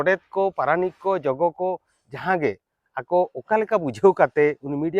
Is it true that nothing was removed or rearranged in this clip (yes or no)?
yes